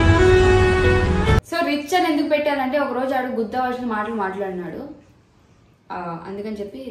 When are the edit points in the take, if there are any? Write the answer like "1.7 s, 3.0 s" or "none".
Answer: 1.5 s